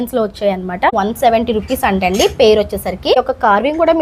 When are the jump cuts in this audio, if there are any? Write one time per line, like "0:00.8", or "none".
0:00.9
0:03.1